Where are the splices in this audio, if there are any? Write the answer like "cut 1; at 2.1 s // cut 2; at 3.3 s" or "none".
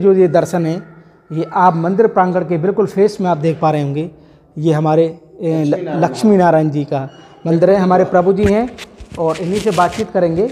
none